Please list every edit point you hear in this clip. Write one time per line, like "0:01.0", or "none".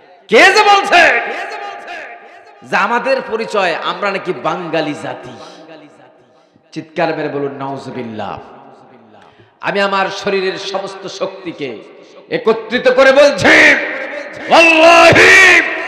none